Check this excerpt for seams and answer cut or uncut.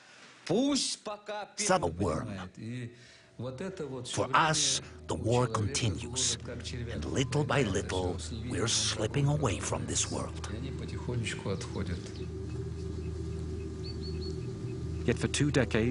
uncut